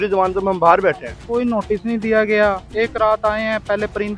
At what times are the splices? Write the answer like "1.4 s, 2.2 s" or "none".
1.2 s, 2.6 s